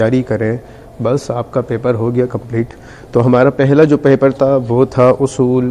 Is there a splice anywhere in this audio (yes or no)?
no